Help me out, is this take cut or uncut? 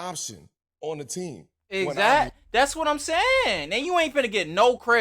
uncut